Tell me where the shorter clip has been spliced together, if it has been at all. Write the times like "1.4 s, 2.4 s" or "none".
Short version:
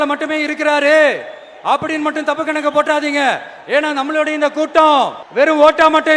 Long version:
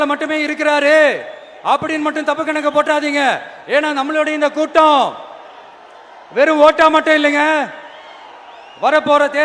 5.2 s